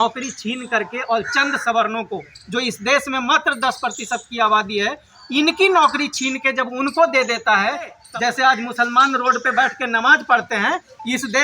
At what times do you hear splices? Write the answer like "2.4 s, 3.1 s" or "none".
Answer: 8.0 s